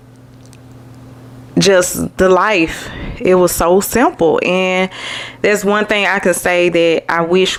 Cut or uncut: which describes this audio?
uncut